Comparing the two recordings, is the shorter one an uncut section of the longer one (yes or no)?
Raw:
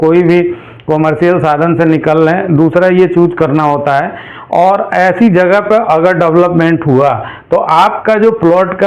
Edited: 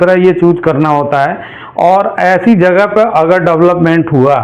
yes